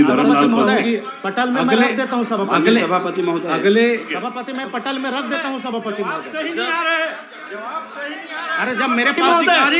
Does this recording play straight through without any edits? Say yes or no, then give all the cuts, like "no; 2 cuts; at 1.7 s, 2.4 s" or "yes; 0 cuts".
yes; 0 cuts